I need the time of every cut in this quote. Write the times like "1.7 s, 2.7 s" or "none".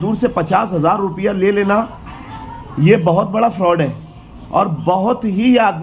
none